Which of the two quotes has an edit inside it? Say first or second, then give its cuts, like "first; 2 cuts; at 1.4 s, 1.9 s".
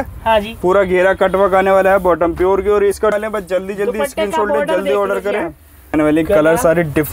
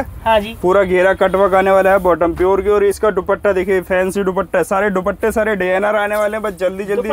first; 2 cuts; at 3.1 s, 5.9 s